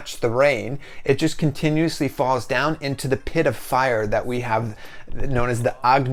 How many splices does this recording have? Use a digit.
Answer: 0